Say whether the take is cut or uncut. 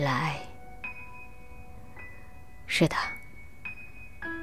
cut